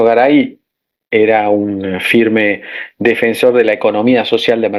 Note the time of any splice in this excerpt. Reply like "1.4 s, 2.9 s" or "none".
none